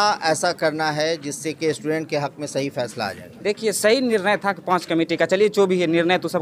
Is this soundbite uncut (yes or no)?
yes